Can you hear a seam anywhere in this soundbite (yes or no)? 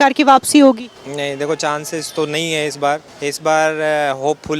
yes